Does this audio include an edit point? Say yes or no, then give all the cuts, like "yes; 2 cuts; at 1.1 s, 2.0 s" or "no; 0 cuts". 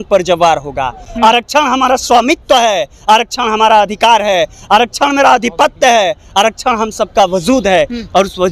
no; 0 cuts